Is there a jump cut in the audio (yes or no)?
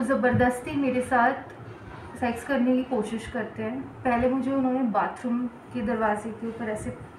no